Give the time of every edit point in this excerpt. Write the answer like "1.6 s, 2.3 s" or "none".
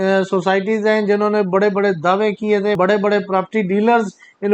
2.8 s